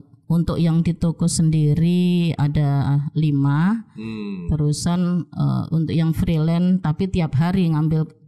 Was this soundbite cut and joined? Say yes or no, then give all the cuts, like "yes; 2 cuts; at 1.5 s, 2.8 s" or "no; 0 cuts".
no; 0 cuts